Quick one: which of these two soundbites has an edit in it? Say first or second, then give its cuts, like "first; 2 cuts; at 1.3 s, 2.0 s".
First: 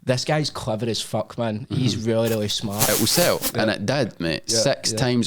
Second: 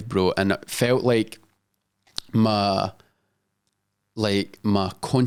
first; 1 cut; at 2.9 s